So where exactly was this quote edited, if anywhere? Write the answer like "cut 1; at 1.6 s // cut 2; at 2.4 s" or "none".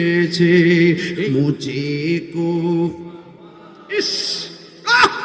cut 1; at 1.2 s